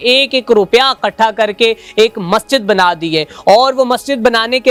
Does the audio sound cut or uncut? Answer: uncut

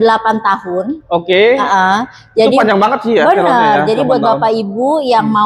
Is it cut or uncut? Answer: uncut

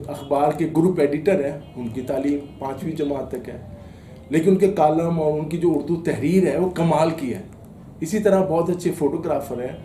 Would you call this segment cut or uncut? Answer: uncut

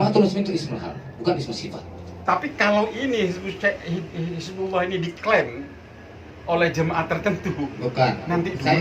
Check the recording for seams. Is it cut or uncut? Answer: cut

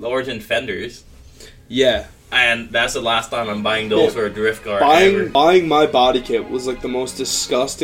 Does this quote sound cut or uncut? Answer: cut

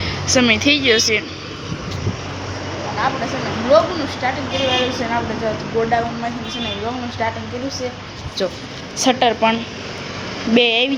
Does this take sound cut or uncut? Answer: uncut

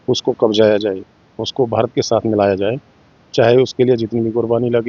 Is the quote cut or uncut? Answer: uncut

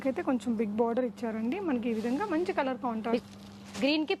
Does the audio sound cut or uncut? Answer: cut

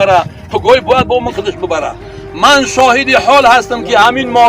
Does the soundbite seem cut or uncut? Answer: cut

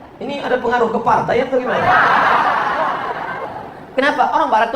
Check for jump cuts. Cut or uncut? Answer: cut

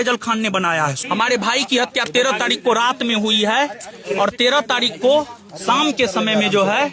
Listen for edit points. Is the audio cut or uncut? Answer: cut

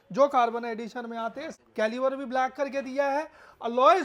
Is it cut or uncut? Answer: cut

